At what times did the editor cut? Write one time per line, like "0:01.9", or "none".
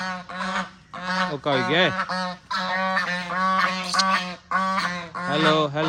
none